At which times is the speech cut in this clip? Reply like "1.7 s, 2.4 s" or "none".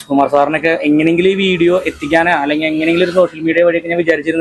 none

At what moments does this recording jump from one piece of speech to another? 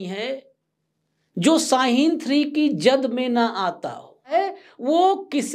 4.3 s

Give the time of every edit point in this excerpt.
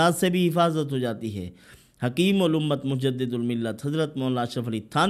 none

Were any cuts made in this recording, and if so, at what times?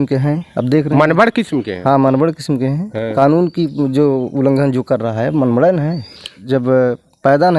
3.0 s, 6.4 s

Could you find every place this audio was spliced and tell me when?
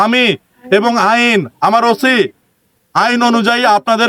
none

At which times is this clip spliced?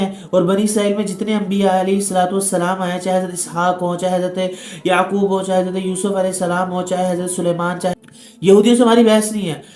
7.9 s

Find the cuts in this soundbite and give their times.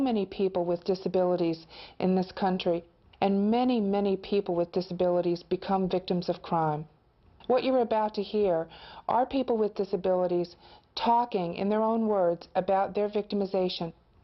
4.8 s

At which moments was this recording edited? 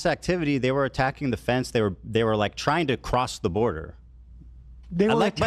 none

